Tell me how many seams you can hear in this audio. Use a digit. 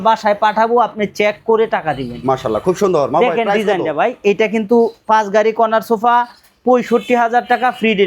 0